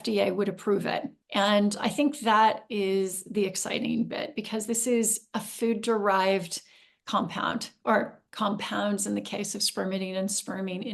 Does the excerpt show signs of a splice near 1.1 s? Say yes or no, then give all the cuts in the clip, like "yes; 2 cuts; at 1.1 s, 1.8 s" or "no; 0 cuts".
yes; 1 cut; at 1.1 s